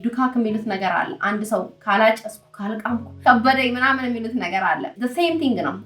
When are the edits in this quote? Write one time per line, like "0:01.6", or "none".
none